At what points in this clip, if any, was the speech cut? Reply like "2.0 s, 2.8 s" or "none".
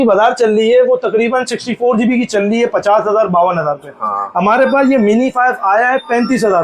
none

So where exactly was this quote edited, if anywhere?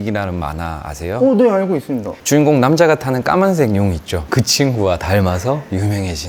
none

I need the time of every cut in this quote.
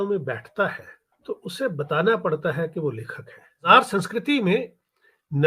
3.7 s

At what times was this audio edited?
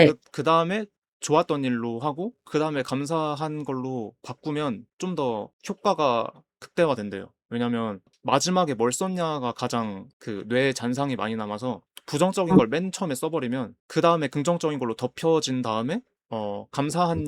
8.1 s

